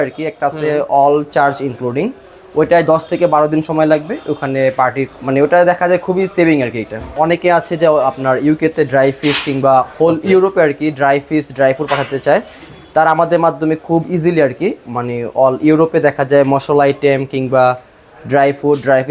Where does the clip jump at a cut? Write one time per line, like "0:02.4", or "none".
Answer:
0:07.1